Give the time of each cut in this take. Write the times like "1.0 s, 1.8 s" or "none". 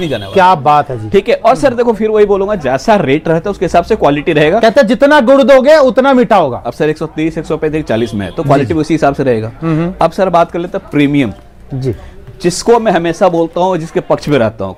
none